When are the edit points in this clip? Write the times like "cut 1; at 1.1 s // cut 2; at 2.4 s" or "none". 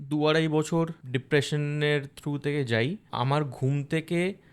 cut 1; at 1.0 s // cut 2; at 3.0 s